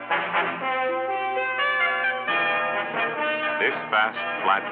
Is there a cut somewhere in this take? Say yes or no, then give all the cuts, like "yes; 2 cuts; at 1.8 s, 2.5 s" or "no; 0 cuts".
no; 0 cuts